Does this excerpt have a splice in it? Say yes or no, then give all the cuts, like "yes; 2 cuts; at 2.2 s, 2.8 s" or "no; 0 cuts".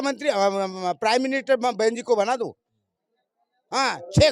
no; 0 cuts